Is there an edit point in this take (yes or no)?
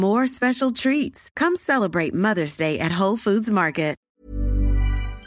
yes